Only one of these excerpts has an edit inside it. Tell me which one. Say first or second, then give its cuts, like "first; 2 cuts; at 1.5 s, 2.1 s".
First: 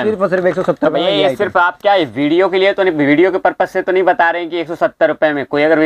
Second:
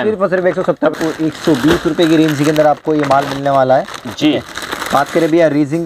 second; 1 cut; at 0.9 s